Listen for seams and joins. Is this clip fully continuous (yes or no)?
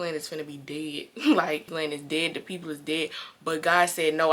no